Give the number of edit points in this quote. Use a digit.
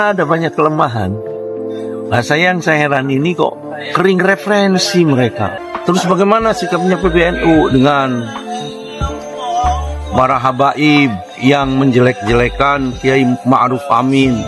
1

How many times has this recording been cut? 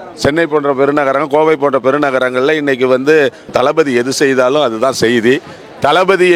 1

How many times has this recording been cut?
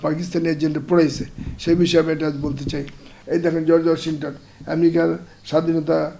1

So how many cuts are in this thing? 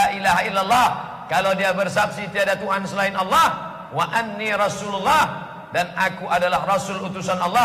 0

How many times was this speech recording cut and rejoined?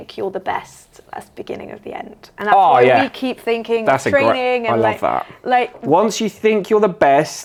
0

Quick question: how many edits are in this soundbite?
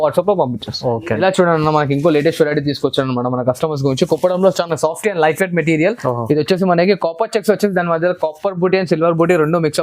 1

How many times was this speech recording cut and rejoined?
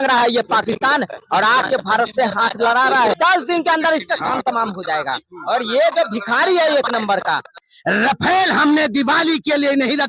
2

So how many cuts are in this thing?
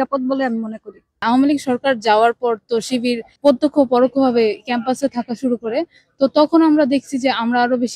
1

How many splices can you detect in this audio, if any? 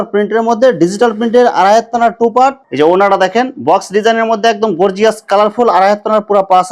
1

